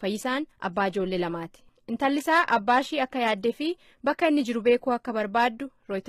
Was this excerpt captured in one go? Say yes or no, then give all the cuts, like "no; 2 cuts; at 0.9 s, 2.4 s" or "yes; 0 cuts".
no; 1 cut; at 2.9 s